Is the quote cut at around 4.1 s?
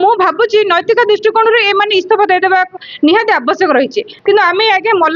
yes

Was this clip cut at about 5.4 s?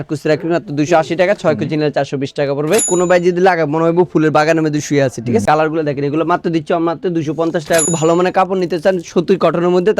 yes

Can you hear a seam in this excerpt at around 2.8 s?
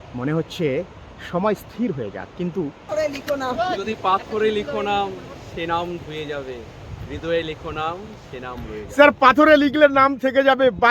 yes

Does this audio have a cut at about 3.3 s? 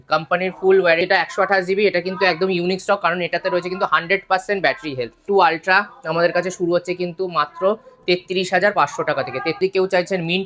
no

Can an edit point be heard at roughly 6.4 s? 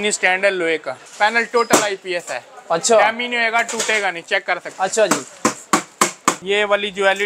yes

